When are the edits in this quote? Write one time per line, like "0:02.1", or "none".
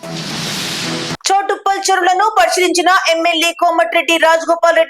0:01.1